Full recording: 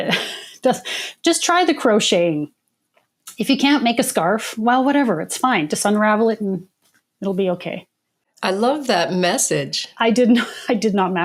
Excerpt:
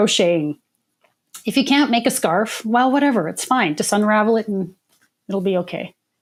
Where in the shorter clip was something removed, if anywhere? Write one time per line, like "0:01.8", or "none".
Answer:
none